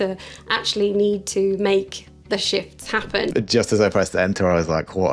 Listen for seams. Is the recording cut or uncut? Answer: cut